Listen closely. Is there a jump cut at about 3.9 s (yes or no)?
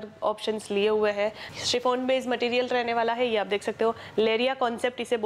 no